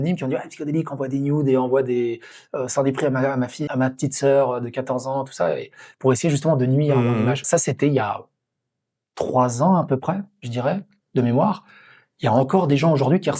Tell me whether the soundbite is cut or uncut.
cut